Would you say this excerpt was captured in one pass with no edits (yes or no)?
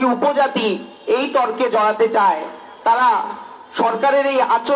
yes